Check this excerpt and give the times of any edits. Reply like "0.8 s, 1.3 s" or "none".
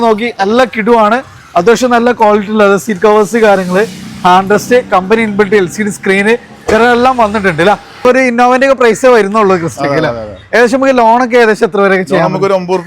8.0 s